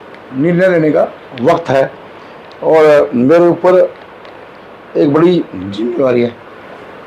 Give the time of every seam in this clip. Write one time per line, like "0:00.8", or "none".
none